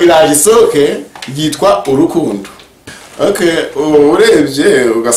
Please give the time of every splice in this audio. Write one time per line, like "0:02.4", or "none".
0:03.0